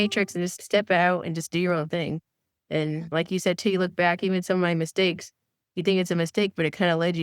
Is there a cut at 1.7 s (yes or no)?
no